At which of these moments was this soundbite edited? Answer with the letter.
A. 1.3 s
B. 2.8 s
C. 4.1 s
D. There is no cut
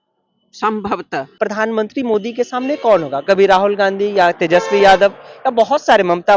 A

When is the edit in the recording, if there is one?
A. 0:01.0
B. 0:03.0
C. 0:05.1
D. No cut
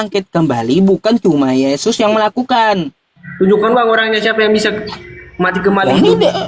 B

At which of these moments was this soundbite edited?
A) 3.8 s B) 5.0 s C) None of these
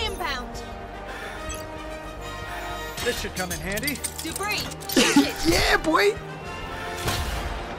C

